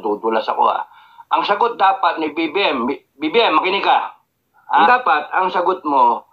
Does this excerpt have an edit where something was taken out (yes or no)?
yes